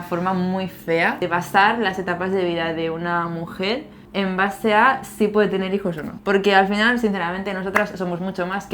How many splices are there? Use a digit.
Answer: 0